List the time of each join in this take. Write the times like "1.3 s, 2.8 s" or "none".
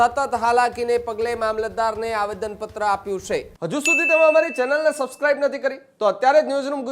3.5 s